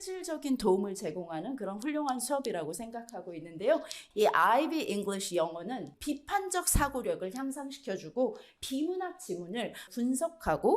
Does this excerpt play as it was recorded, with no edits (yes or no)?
no